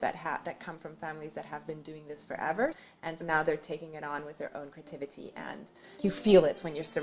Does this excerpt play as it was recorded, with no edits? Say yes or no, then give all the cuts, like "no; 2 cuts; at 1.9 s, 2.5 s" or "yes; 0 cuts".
no; 2 cuts; at 2.8 s, 5.9 s